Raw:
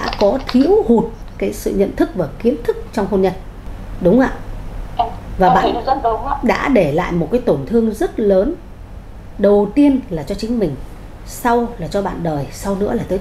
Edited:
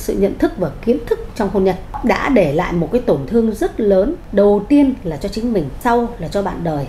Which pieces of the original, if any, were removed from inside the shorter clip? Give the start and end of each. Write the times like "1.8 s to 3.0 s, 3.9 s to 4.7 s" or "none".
3.5 s to 6.3 s, 8.6 s to 9.3 s, 10.8 s to 11.3 s

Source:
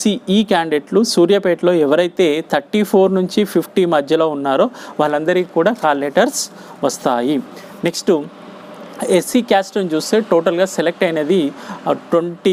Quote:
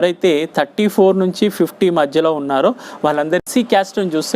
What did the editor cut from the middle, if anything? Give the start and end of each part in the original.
5.4 s to 9.2 s

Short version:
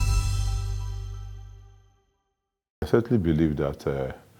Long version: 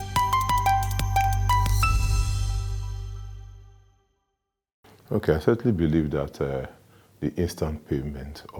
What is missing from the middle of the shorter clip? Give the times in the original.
4.8 s to 5.4 s

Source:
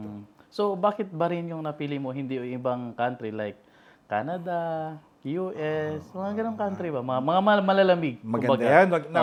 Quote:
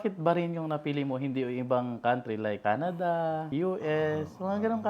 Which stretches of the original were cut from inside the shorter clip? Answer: 3.5 s to 4.0 s, 4.9 s to 5.2 s

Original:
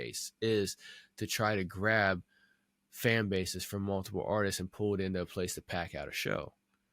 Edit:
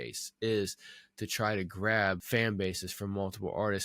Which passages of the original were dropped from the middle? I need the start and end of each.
2.2 s to 2.9 s

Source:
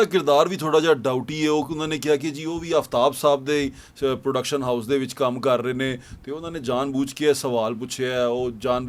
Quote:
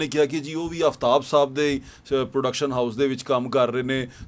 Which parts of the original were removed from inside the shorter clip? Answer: none

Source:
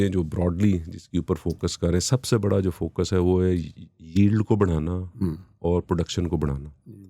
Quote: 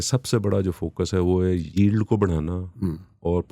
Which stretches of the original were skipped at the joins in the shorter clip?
3.7 s to 4.1 s

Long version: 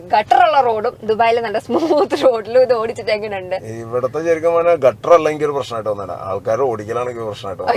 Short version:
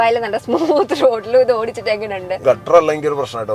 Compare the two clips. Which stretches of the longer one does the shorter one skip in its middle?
3.6 s to 4.8 s

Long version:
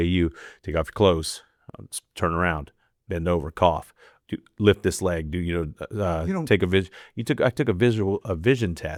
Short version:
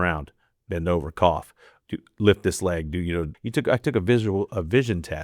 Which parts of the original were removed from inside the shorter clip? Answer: 5.7 s to 7.1 s

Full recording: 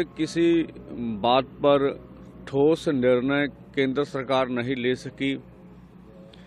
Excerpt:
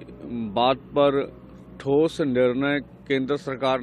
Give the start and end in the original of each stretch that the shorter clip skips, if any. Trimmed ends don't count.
none

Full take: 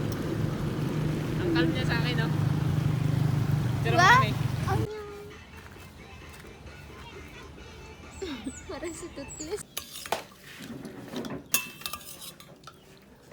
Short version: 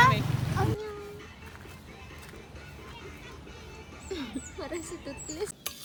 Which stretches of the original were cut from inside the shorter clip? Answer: none

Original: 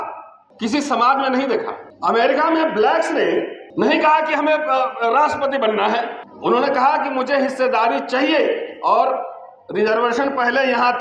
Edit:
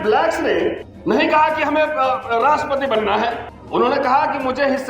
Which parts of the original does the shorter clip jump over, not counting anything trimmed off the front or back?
none

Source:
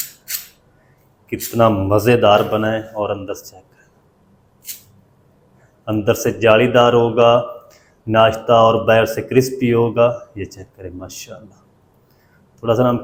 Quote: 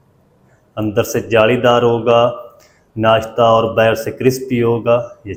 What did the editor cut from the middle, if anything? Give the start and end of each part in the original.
none

